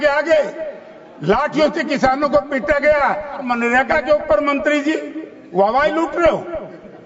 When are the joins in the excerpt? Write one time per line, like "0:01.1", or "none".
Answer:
0:03.4